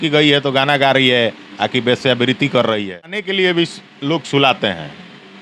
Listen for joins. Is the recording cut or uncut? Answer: cut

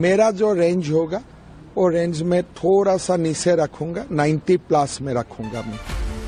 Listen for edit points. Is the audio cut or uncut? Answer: uncut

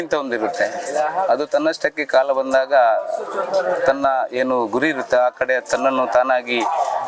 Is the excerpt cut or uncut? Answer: uncut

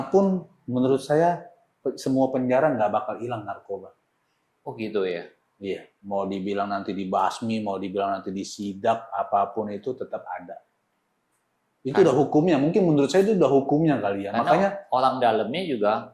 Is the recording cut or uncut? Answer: uncut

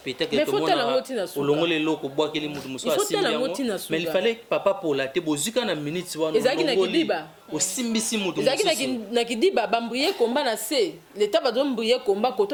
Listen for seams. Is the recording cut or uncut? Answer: uncut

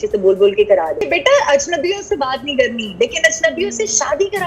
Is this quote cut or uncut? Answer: cut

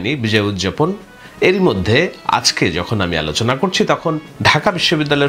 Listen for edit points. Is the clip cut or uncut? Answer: uncut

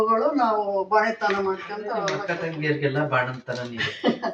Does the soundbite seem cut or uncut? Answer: cut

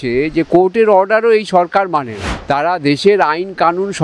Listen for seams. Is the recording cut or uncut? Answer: cut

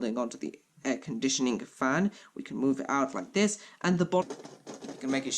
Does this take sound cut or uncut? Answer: cut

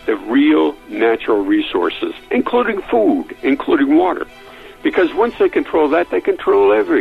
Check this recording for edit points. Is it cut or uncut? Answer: uncut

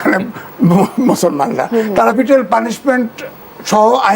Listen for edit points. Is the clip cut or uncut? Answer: cut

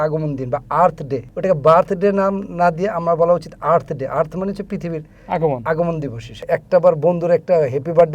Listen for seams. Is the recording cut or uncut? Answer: cut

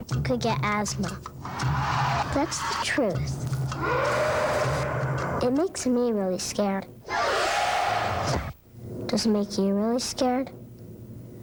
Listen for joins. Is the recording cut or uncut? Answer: uncut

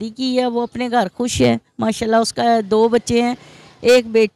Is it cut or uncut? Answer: uncut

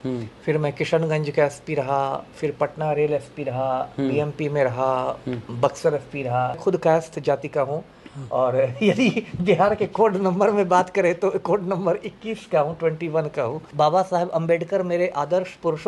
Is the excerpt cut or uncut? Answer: cut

